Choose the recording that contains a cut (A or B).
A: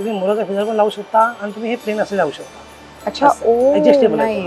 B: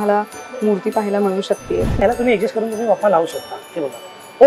B